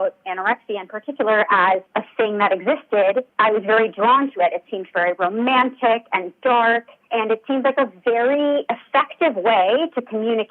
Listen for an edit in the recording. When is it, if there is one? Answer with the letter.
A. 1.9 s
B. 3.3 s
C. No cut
A